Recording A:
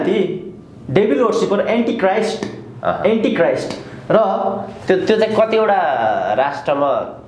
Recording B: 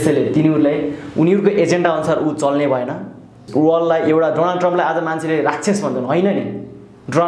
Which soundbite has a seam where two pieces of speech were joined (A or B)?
B